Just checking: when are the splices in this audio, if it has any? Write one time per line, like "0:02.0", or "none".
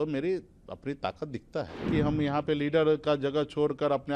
0:01.9